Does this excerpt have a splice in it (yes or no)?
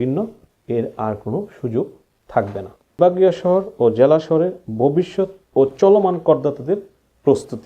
yes